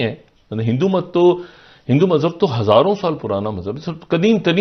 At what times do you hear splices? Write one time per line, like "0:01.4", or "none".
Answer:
none